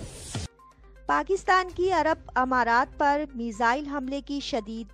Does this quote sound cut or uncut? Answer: cut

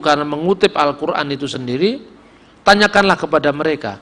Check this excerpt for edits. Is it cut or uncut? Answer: uncut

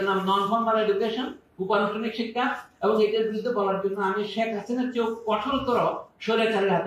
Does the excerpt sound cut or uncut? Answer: uncut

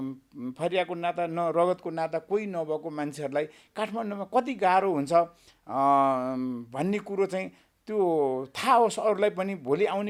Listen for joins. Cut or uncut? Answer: uncut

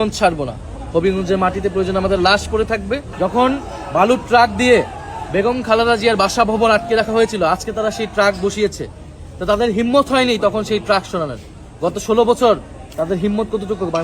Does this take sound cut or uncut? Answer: cut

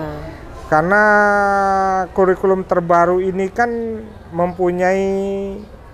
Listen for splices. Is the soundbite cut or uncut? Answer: uncut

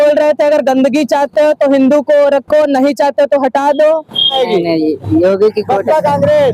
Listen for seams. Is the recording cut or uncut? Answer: cut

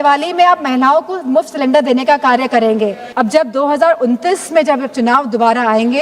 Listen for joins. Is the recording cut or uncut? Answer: cut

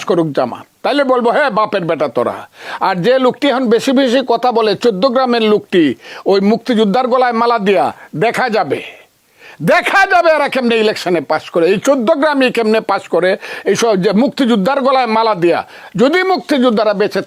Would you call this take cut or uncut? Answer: uncut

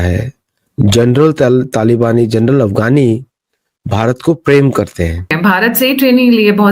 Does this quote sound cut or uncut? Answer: cut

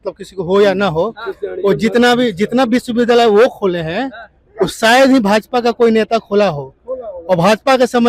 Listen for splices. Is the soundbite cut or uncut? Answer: uncut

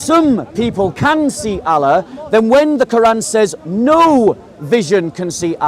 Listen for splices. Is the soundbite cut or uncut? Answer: uncut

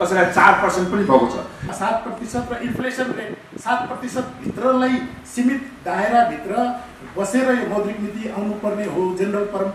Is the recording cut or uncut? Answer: cut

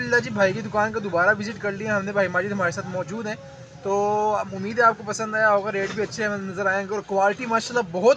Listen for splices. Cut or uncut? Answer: uncut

